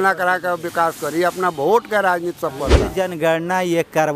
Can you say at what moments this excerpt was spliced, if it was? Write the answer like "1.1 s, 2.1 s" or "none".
2.9 s